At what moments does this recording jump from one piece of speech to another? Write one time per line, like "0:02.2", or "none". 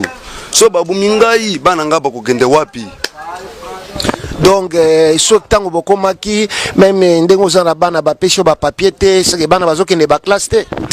none